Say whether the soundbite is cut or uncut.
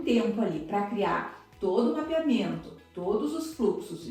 uncut